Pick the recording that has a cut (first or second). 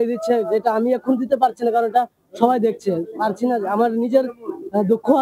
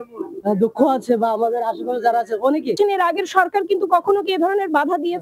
second